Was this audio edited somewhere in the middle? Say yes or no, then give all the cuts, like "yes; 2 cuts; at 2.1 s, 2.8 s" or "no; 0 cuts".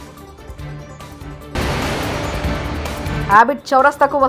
yes; 2 cuts; at 1.5 s, 3.2 s